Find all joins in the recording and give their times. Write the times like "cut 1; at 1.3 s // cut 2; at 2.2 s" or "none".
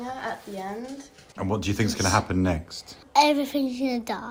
cut 1; at 1.3 s